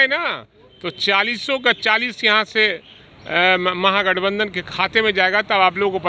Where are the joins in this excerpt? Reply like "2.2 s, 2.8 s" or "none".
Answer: none

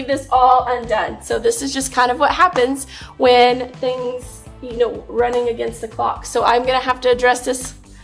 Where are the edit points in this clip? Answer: none

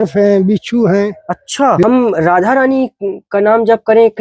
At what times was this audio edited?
1.8 s

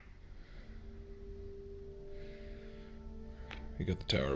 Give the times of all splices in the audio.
none

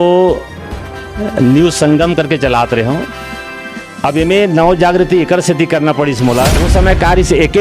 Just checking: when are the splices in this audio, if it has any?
6.6 s

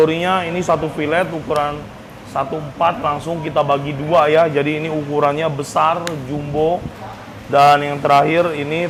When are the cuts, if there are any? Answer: none

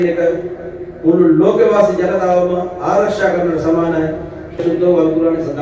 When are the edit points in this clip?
4.6 s

